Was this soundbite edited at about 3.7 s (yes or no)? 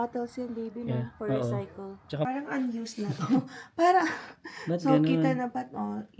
no